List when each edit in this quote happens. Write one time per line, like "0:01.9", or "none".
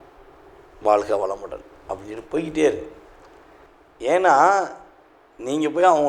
none